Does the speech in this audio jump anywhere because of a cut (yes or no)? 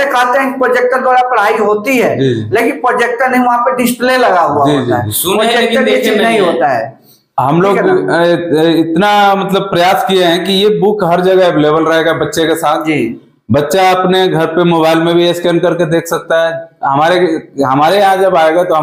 no